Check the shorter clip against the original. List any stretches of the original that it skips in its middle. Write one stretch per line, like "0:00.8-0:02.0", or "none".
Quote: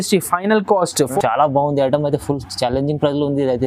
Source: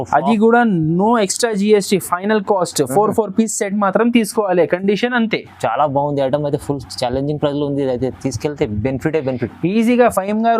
0:02.9-0:05.5